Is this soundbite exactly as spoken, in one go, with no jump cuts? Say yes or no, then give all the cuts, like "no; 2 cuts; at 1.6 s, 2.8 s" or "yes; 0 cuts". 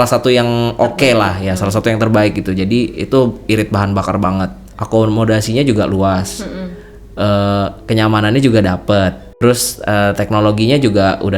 no; 2 cuts; at 4.7 s, 9.3 s